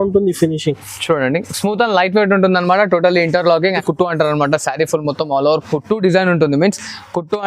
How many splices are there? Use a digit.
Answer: 1